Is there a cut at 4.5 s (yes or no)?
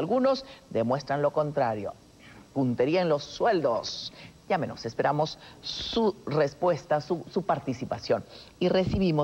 yes